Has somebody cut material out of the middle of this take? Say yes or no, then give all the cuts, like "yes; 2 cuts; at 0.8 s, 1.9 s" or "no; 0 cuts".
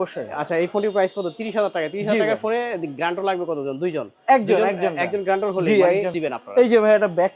yes; 1 cut; at 6.1 s